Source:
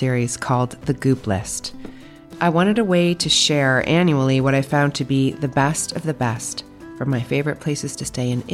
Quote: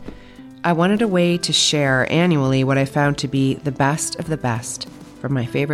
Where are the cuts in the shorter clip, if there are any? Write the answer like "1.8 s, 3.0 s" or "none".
none